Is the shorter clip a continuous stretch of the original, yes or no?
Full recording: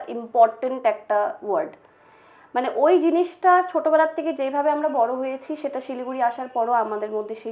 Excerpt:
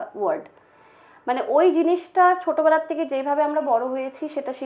yes